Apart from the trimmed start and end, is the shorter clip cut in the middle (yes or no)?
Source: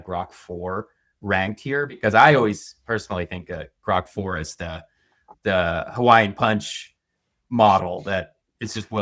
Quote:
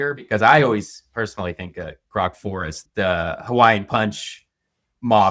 yes